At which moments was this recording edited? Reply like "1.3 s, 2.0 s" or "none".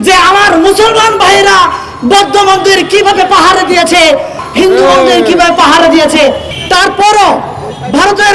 4.4 s, 6.5 s